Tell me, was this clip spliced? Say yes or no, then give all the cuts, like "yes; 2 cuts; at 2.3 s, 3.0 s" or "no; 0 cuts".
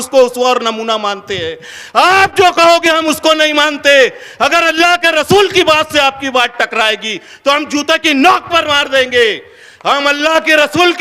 no; 0 cuts